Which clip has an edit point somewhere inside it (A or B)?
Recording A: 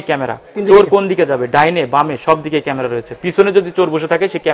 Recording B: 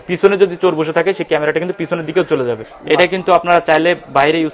B